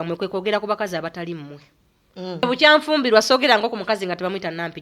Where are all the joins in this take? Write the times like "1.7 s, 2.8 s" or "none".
2.4 s

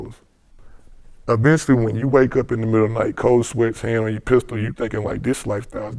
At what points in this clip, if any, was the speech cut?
none

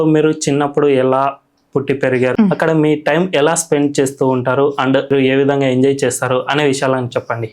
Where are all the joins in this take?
2.3 s, 5.1 s

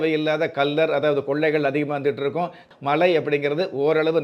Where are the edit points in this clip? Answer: 2.7 s

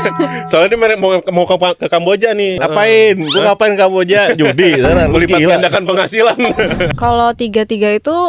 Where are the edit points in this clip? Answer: 2.5 s, 6.9 s

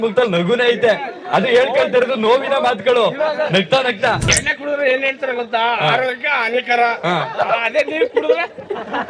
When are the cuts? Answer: 4.4 s

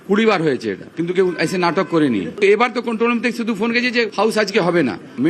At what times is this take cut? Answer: 4.1 s

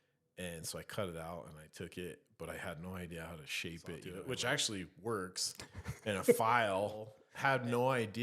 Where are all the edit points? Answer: 4.1 s, 7.2 s

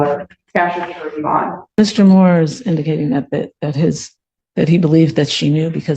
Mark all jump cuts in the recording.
1.6 s

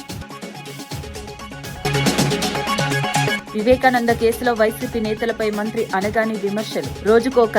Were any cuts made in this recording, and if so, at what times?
1.8 s, 3.3 s

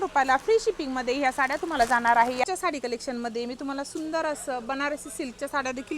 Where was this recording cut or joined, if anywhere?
2.4 s

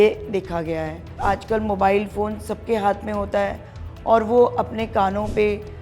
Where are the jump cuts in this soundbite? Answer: 1.2 s

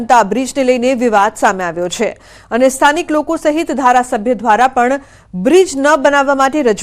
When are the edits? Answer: 1.7 s

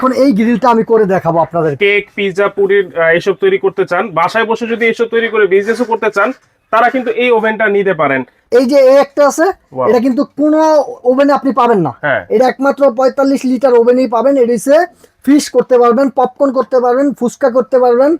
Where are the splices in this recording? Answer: 1.7 s, 8.3 s

